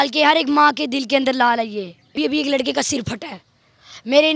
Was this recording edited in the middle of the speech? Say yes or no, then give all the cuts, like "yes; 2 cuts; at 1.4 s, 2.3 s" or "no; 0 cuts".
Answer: yes; 1 cut; at 2.2 s